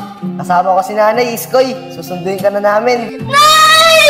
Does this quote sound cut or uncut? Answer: cut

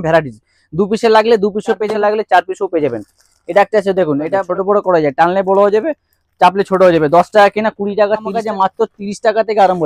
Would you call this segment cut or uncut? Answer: cut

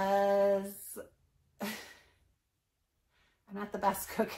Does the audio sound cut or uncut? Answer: uncut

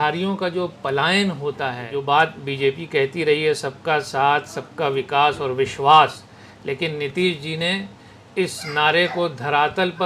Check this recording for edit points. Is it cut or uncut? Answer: cut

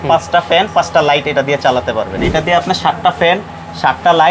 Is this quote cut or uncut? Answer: cut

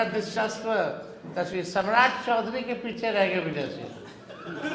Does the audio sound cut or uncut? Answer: uncut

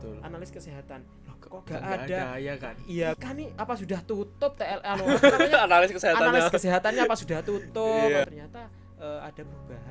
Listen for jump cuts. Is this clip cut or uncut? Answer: cut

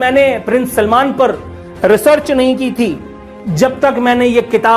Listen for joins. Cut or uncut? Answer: uncut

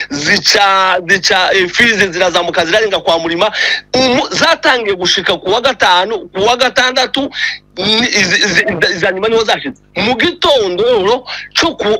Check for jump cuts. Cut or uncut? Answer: uncut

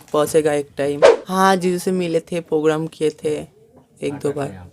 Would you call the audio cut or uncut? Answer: cut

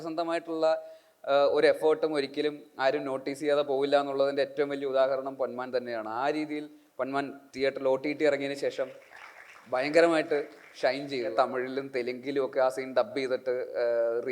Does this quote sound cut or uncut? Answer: cut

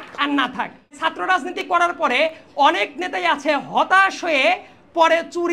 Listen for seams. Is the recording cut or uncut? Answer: cut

